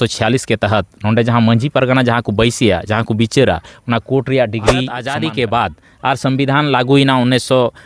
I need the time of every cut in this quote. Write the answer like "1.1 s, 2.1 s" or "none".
5.0 s

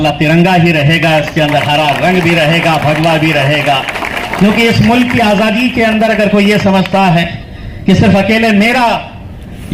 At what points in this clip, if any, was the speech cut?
none

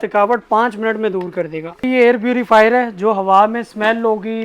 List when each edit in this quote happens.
1.8 s

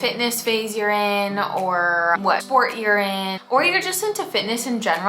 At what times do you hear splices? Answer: 2.2 s, 3.4 s

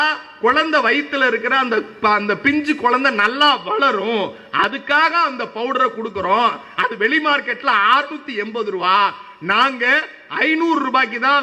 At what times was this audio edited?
none

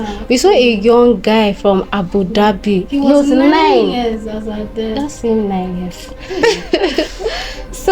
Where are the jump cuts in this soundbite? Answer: 6.4 s

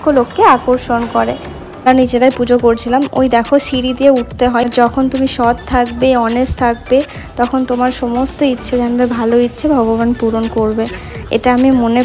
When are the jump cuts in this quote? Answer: 1.9 s, 4.6 s

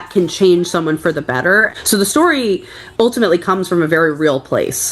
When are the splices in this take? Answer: 1.7 s

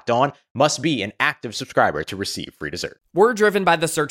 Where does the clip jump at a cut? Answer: 2.9 s

